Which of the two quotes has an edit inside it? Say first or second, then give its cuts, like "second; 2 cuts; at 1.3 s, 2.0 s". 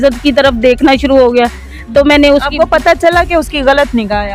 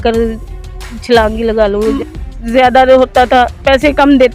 second; 1 cut; at 2.0 s